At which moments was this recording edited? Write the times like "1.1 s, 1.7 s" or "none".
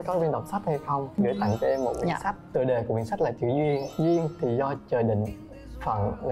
2.3 s